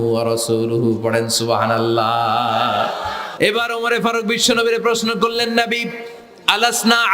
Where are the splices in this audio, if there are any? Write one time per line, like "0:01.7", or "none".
0:03.2